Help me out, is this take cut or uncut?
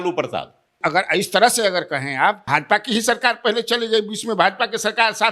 cut